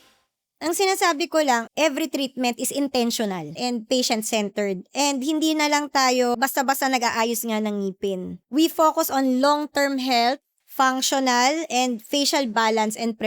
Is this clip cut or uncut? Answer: cut